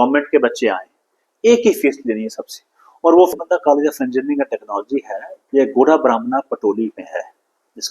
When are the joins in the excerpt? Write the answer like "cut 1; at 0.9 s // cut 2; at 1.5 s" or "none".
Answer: cut 1; at 3.3 s